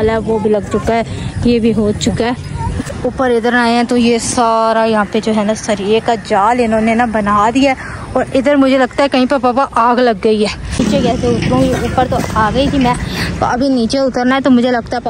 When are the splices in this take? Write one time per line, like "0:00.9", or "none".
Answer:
0:02.9
0:10.8